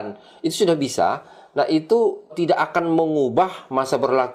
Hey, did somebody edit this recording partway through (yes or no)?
yes